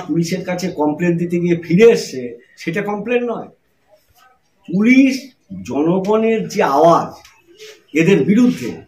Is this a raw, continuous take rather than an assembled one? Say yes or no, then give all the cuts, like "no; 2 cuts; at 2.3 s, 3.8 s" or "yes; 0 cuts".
yes; 0 cuts